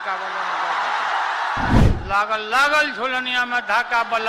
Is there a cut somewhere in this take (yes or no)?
yes